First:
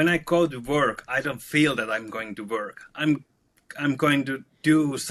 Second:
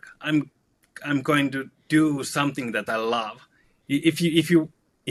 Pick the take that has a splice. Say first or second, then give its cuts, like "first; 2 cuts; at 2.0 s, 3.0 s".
second; 1 cut; at 3.7 s